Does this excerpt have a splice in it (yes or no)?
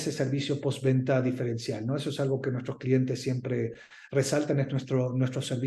no